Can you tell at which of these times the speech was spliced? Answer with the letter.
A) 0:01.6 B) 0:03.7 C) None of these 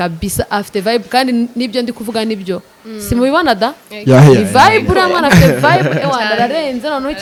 C